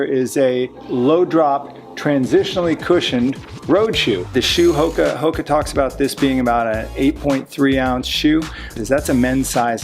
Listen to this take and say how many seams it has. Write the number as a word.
two